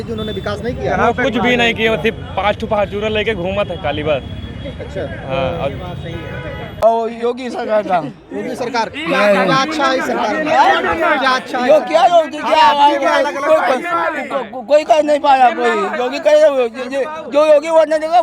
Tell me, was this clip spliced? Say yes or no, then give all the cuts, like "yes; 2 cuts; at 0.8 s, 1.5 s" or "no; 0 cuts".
yes; 1 cut; at 6.8 s